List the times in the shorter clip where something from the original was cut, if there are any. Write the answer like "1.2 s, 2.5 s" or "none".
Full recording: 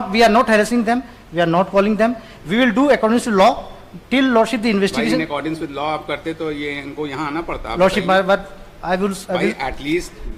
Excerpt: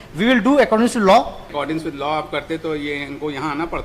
1.6 s